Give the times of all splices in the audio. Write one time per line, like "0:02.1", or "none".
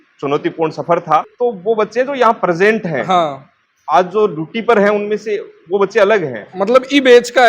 0:01.3